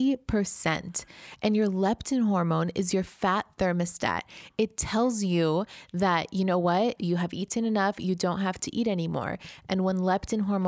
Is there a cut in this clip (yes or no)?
no